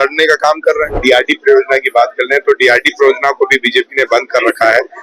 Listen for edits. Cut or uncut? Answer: cut